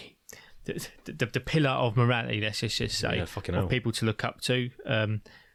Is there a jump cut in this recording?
no; 0 cuts

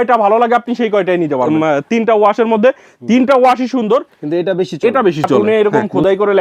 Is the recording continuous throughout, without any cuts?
no; 2 cuts; at 1.5 s, 5.4 s

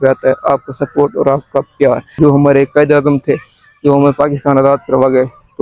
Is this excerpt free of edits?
no; 1 cut; at 2.1 s

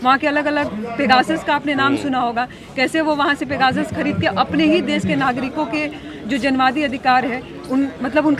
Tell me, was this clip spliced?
no; 0 cuts

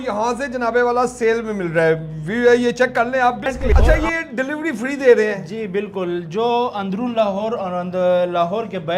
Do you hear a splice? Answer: yes; 1 cut; at 3.6 s

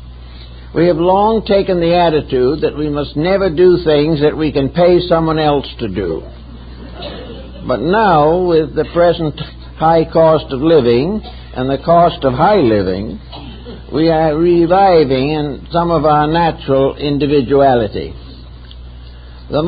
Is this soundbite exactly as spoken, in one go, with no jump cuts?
no; 1 cut; at 3.4 s

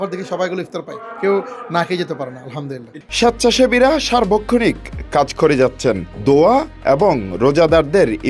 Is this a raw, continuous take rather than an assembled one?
yes; 0 cuts

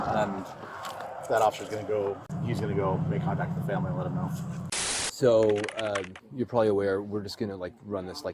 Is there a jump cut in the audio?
yes; 2 cuts; at 2.3 s, 4.6 s

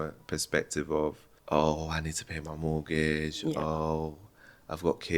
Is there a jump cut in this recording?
yes; 1 cut; at 1.3 s

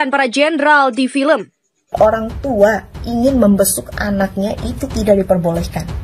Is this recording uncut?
no; 1 cut; at 1.9 s

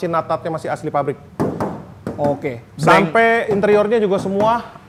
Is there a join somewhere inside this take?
no; 0 cuts

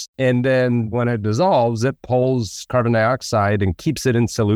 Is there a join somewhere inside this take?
yes; 2 cuts; at 0.9 s, 2.2 s

